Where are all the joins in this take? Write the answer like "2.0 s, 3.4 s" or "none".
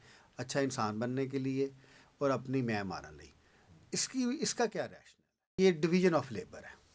5.6 s